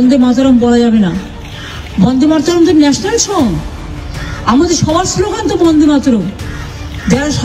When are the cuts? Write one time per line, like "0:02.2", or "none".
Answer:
none